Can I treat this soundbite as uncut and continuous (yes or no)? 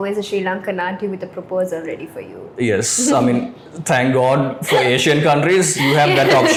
yes